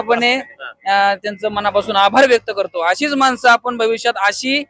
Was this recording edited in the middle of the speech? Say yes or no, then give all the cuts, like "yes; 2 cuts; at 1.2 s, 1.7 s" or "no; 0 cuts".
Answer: no; 0 cuts